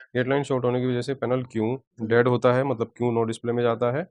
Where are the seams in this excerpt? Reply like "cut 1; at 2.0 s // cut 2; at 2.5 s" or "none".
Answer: cut 1; at 1.9 s